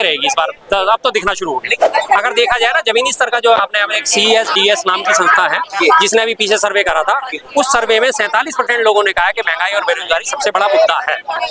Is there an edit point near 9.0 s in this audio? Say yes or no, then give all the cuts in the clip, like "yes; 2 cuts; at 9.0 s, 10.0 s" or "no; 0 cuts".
no; 1 cut; at 1.8 s